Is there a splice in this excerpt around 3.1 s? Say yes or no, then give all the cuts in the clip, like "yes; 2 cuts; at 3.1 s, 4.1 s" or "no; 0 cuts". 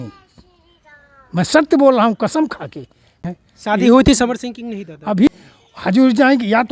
yes; 2 cuts; at 3.1 s, 5.3 s